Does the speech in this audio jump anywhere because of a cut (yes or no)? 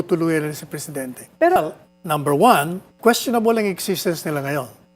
yes